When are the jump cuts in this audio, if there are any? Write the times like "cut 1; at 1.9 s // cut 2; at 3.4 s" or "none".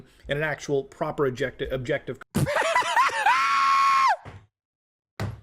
cut 1; at 2.2 s

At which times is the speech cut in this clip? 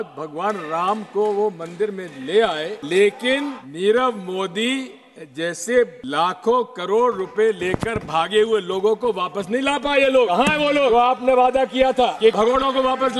cut 1; at 2.8 s // cut 2; at 3.6 s // cut 3; at 6.0 s // cut 4; at 10.8 s // cut 5; at 12.2 s

